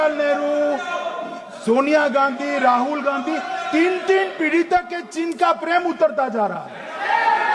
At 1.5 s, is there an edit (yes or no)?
no